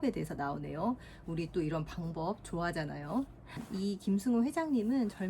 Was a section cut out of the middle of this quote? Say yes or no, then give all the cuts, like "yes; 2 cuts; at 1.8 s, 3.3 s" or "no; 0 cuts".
yes; 1 cut; at 3.6 s